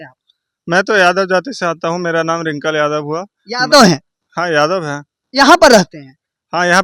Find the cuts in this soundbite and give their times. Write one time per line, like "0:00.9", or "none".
none